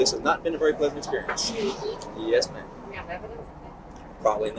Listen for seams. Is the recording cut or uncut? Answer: uncut